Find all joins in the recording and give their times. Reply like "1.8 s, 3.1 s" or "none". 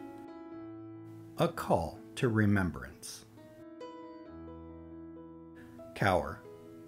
3.8 s, 5.6 s